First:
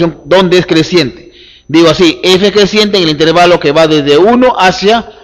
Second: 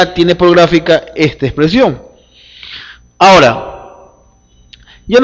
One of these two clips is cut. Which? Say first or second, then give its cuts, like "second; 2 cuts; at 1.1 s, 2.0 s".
first; 1 cut; at 3.5 s